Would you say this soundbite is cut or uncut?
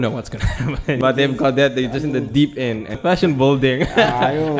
cut